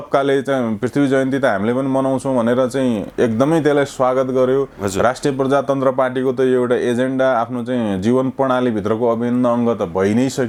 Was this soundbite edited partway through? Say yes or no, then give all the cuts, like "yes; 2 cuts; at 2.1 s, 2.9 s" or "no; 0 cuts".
no; 0 cuts